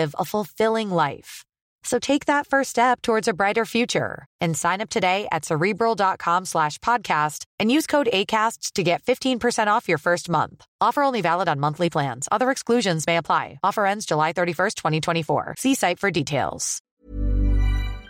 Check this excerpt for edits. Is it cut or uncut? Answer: cut